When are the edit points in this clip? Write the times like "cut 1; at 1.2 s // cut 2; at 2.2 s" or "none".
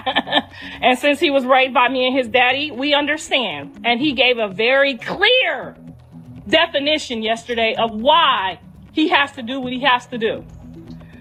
none